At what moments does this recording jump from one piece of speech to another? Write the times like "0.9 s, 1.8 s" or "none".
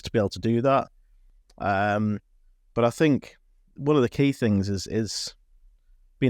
none